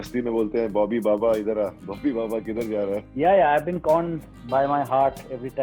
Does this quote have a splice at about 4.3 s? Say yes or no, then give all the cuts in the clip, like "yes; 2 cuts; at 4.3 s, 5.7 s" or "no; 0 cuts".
no; 1 cut; at 3.1 s